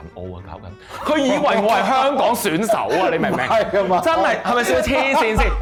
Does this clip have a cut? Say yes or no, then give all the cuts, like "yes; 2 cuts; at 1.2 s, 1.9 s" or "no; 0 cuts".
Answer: no; 0 cuts